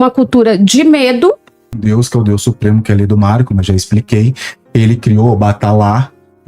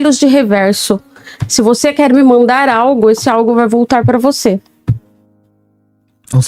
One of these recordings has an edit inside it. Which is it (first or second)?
first